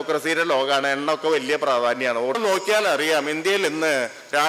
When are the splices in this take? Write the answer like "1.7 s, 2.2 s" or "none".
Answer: 2.4 s